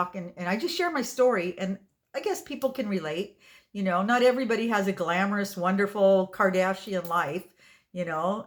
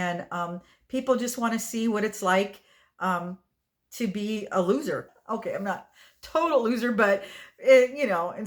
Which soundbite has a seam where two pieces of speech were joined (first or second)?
second